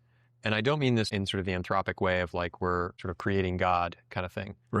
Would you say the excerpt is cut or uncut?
cut